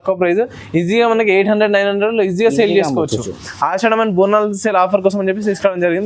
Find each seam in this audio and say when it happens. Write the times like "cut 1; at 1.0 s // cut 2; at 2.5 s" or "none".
none